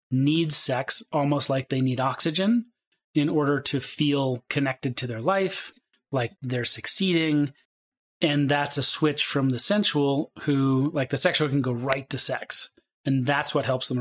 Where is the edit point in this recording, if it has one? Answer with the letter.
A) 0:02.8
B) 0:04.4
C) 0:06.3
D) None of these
C